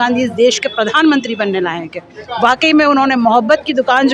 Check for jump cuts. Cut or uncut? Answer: uncut